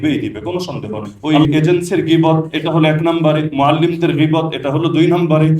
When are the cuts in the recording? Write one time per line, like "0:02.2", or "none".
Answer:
0:01.1